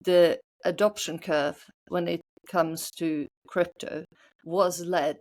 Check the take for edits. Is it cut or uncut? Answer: uncut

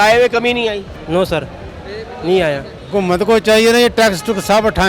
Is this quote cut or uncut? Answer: cut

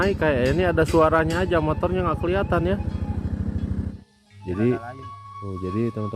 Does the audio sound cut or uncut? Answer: cut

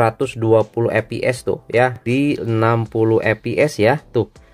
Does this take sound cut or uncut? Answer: cut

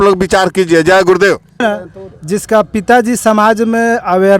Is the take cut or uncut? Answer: cut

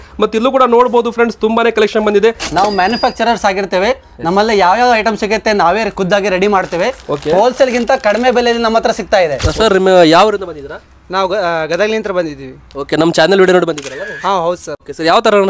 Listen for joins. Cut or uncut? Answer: cut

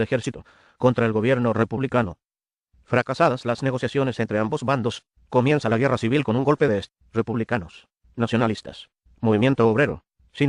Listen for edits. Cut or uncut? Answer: uncut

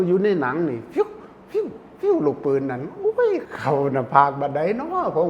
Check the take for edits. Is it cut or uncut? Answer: cut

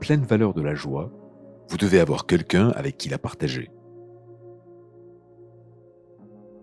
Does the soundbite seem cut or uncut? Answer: cut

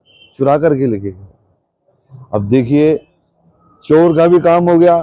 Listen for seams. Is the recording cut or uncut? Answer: uncut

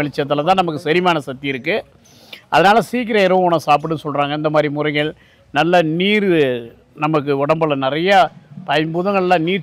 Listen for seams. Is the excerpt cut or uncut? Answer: uncut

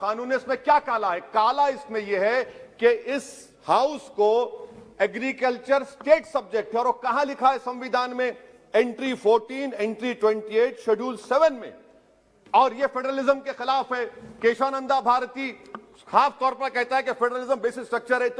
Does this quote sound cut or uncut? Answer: uncut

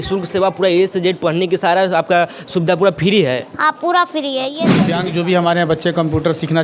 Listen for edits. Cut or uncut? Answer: cut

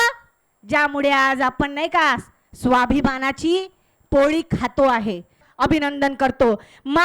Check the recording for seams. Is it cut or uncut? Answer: cut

